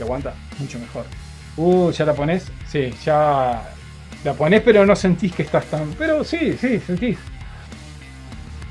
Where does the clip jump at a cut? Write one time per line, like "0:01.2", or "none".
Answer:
0:02.6